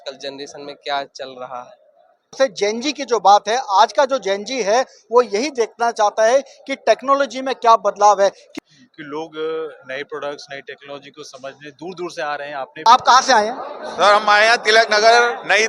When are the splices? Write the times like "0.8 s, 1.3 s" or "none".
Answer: 2.4 s, 8.4 s, 12.8 s